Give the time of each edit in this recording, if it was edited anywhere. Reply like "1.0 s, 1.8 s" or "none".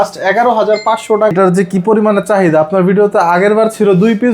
1.3 s